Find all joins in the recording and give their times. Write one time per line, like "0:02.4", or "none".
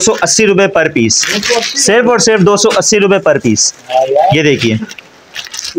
none